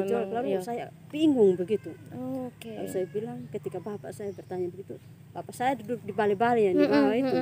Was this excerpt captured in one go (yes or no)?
yes